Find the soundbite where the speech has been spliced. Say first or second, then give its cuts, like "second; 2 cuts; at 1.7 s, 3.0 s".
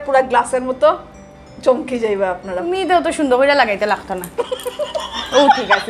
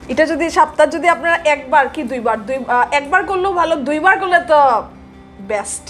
first; 1 cut; at 2.7 s